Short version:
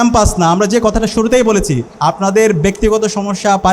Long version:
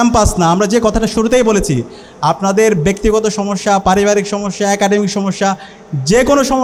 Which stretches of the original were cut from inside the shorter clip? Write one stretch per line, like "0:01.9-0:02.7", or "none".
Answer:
0:01.8-0:02.1